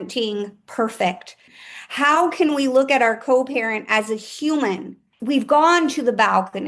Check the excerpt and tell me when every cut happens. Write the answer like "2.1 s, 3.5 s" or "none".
1.5 s, 5.1 s